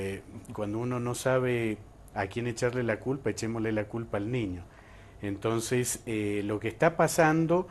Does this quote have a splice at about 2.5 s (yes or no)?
no